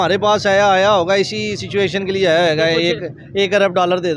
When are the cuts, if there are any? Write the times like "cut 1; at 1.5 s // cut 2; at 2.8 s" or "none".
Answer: none